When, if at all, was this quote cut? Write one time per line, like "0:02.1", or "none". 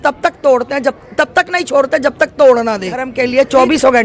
0:03.1